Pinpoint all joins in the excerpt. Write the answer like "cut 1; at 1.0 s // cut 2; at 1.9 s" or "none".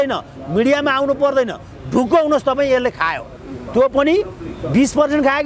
none